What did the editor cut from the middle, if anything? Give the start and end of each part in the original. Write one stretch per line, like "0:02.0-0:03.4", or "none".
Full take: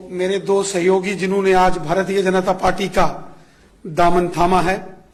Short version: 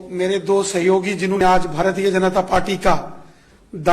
0:01.4-0:01.5